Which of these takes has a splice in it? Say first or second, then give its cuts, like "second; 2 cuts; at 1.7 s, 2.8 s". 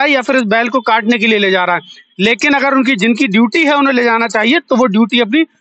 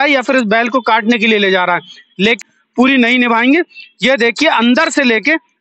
second; 1 cut; at 2.4 s